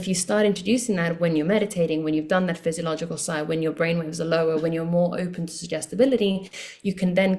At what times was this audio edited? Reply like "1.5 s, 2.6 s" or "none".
none